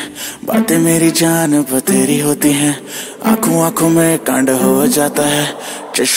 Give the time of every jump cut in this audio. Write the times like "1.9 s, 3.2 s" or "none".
none